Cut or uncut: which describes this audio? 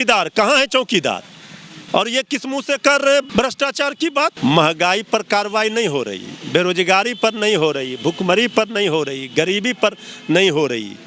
cut